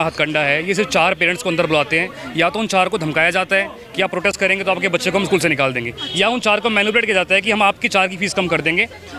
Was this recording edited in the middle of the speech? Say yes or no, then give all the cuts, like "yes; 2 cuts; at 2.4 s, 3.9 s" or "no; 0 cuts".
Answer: no; 0 cuts